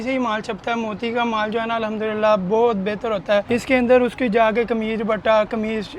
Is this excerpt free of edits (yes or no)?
no